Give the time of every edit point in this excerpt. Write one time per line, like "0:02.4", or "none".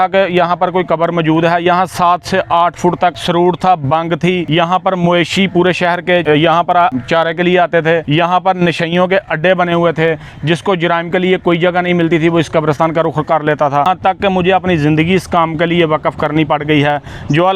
0:03.2
0:04.4
0:06.2
0:06.9
0:08.1
0:13.8